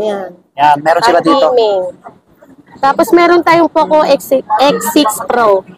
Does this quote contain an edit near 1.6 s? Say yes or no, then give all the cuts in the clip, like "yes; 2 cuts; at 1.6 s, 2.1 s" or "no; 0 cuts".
no; 0 cuts